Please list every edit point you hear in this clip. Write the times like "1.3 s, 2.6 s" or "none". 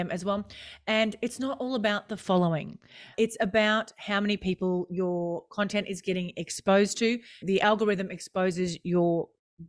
3.1 s, 7.4 s

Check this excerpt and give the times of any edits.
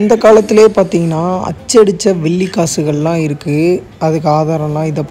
none

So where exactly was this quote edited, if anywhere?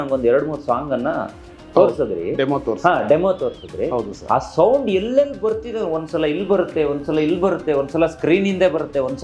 none

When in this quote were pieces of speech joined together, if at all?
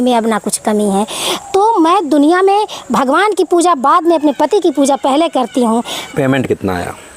6.0 s

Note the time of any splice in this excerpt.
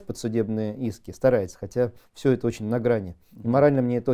none

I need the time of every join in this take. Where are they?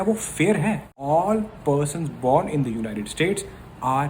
1.0 s

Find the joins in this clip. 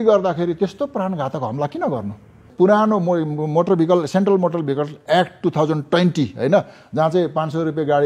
2.4 s

